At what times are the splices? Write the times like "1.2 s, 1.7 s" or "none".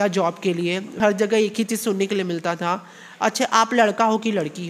1.0 s